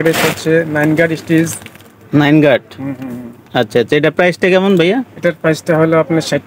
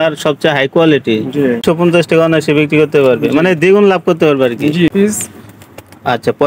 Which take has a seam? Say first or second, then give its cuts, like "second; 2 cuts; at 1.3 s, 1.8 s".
second; 2 cuts; at 1.6 s, 4.9 s